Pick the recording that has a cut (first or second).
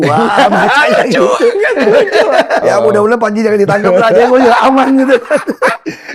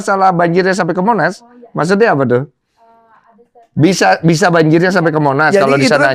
first